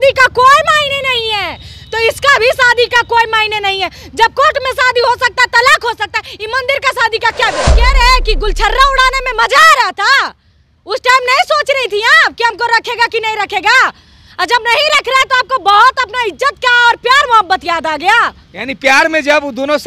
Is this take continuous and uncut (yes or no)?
no